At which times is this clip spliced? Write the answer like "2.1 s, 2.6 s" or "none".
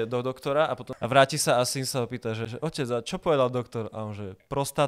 0.9 s, 2.5 s